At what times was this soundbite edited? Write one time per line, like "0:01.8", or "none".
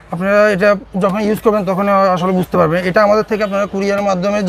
none